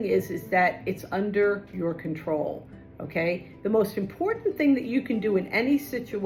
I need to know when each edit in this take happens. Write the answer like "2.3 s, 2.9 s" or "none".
none